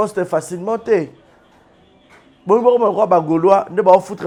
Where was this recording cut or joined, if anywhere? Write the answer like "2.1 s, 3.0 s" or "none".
none